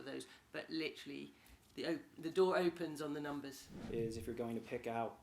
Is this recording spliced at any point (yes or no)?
yes